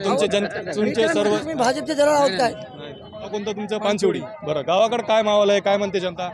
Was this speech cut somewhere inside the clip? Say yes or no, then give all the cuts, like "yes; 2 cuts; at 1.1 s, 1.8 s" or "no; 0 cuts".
yes; 1 cut; at 3.1 s